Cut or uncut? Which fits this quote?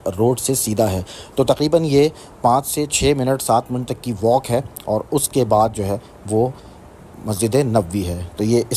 uncut